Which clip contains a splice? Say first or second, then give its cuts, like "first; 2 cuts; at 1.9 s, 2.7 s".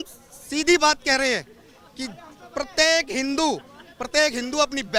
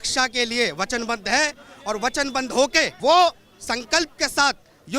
second; 1 cut; at 2.9 s